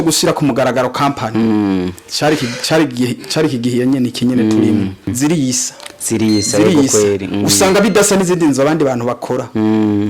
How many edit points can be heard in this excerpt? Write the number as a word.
one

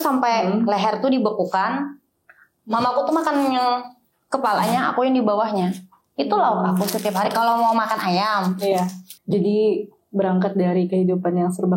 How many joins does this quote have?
one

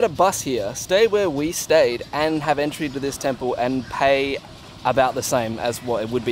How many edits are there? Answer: zero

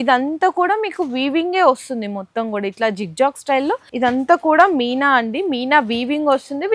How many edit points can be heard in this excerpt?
one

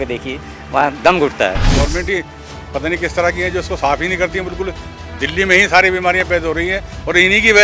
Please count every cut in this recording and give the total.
one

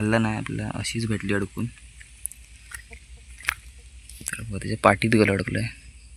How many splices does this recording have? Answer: zero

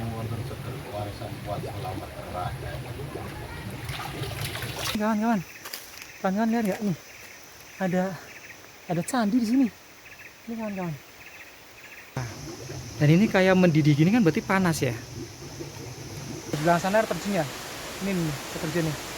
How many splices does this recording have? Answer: three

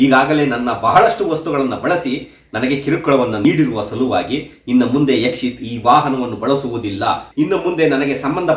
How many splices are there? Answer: two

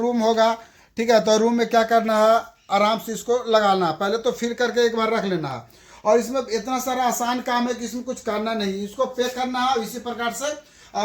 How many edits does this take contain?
zero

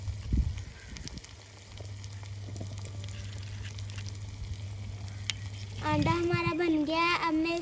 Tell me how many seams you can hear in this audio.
one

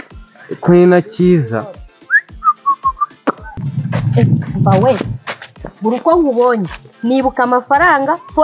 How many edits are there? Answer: one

